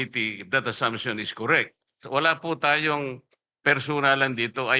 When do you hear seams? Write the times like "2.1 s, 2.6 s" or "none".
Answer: 2.0 s